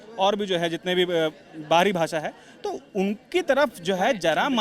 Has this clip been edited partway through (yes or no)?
no